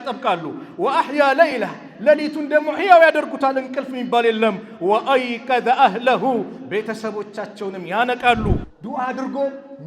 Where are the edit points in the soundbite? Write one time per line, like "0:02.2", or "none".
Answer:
0:08.7